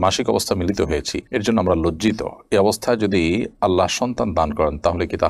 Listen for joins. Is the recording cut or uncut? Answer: uncut